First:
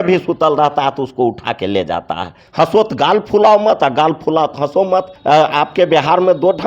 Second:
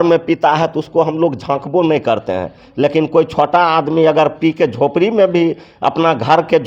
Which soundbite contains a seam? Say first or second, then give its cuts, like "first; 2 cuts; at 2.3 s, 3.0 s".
first; 2 cuts; at 2.4 s, 5.1 s